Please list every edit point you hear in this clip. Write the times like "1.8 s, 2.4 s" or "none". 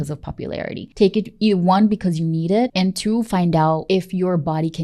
0.9 s, 2.7 s, 3.8 s